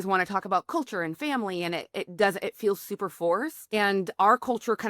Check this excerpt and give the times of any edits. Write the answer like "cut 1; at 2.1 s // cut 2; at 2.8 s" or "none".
cut 1; at 3.7 s